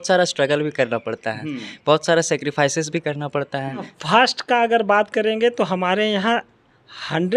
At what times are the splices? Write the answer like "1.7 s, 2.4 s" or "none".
3.9 s